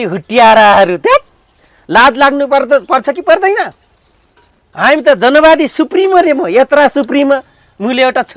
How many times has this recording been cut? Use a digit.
0